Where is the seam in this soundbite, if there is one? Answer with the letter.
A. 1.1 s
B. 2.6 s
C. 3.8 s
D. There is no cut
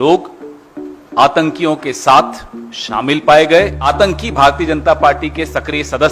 C